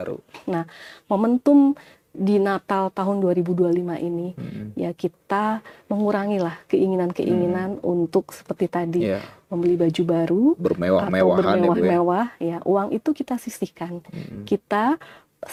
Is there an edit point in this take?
no; 0 cuts

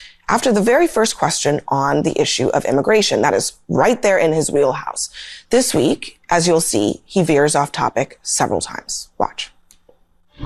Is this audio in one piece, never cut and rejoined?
yes; 0 cuts

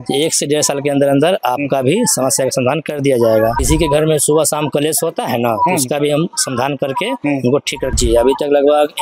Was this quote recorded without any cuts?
no; 2 cuts; at 3.6 s, 7.8 s

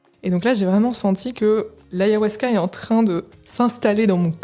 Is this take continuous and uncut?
no; 2 cuts; at 1.8 s, 3.4 s

